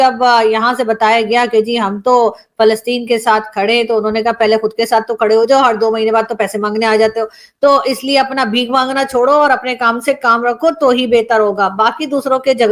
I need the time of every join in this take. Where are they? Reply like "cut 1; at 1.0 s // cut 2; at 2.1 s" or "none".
none

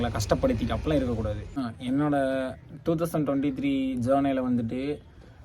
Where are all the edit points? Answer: cut 1; at 1.6 s

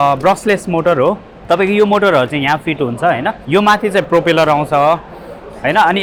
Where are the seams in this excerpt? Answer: none

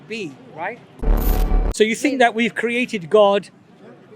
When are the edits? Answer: cut 1; at 1.4 s

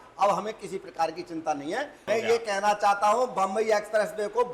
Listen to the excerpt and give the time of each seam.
cut 1; at 2.0 s

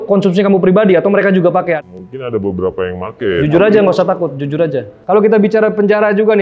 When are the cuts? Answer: cut 1; at 1.8 s // cut 2; at 4.9 s

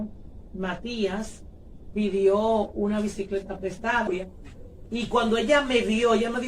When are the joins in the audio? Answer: cut 1; at 4.1 s

